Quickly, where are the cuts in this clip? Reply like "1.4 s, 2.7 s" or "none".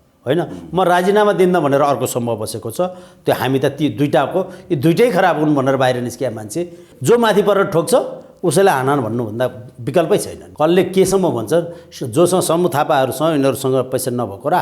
6.9 s, 10.4 s